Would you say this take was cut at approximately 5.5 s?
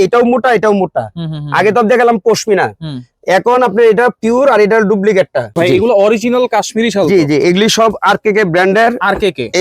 yes; 1 cut; at 5.5 s

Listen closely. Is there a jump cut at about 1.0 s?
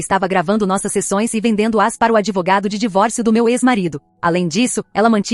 no; 1 cut; at 4.1 s

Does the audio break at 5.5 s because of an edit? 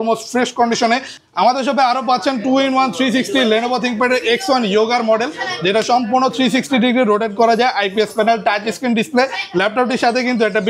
no; 1 cut; at 1.1 s

